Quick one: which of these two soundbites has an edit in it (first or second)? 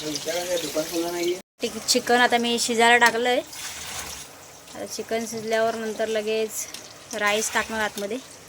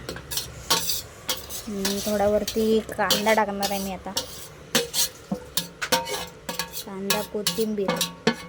first